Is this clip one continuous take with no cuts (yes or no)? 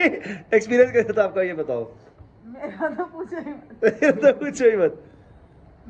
yes